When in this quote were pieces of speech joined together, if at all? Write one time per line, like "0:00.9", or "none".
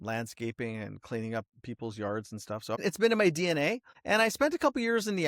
0:02.8
0:03.9